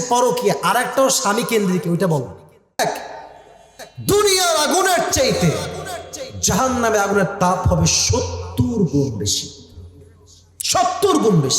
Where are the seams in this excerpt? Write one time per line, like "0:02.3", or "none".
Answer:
0:02.8